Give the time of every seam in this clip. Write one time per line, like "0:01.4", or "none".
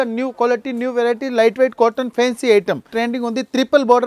0:02.9